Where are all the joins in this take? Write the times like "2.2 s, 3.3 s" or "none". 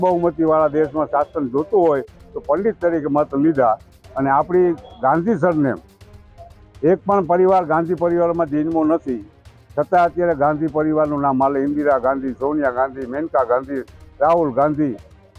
none